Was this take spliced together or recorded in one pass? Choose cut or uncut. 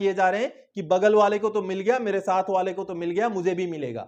uncut